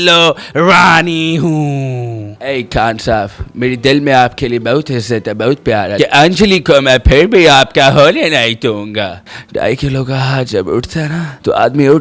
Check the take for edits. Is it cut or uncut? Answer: cut